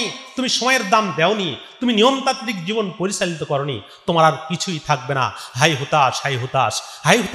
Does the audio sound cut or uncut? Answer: uncut